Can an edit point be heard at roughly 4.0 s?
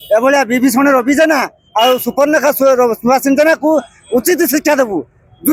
no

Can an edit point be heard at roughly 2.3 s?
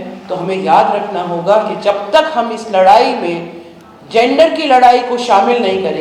no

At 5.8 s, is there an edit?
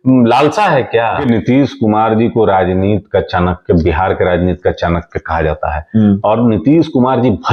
no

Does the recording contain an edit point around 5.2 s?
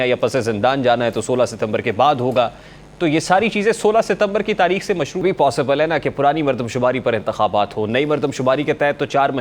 yes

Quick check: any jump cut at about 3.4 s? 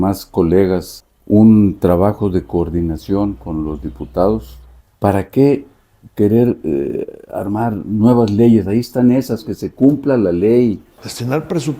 no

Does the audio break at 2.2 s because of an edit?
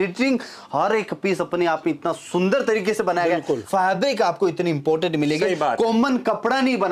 no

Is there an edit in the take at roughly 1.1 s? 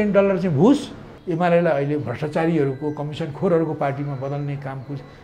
yes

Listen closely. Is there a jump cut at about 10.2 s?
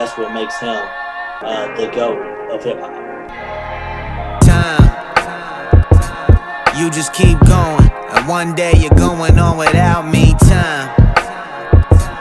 no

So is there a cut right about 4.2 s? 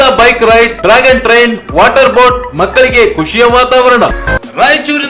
yes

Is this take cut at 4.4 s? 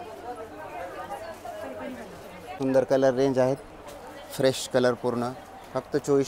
no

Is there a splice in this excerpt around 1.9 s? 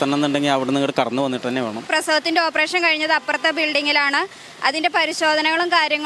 yes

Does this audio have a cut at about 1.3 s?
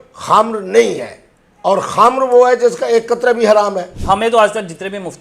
no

